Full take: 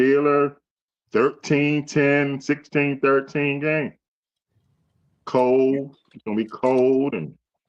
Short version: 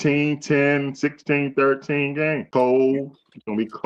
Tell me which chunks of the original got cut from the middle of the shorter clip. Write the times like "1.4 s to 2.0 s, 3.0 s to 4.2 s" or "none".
3.9 s to 5.2 s